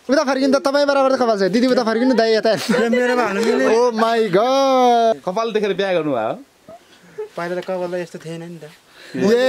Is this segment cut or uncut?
cut